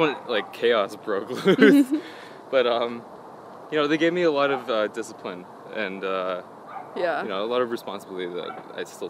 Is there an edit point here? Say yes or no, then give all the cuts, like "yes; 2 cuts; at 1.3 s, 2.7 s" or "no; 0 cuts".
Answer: no; 0 cuts